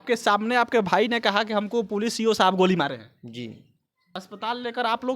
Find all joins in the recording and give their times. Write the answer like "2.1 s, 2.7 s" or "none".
4.1 s

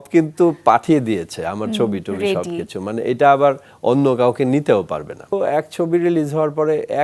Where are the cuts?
5.3 s

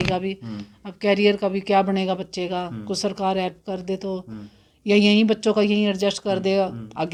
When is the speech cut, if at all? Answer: none

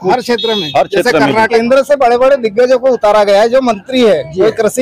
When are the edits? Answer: 1.5 s

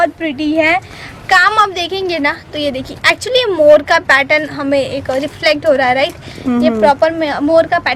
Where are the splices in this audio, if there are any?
none

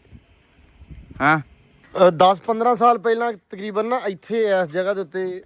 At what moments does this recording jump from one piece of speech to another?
1.8 s

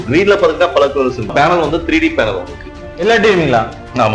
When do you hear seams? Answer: 1.3 s

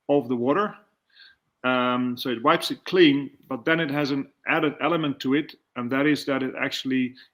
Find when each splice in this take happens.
none

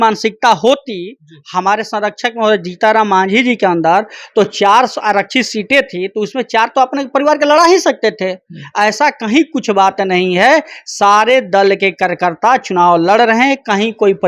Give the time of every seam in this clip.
none

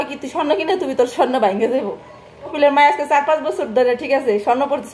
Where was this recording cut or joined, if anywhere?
2.5 s

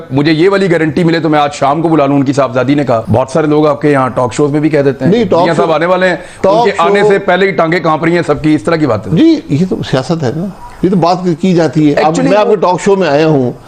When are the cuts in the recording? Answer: none

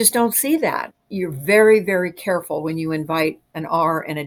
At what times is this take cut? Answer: none

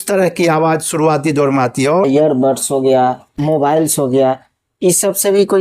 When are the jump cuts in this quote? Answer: 2.1 s, 3.3 s

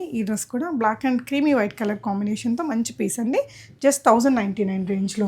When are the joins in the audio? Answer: none

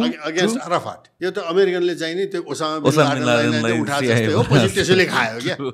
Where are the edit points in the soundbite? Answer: 1.1 s

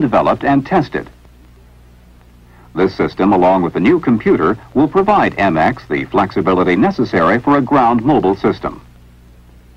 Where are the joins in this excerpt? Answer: 2.0 s

